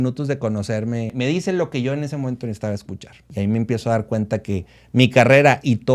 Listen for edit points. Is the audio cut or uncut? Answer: cut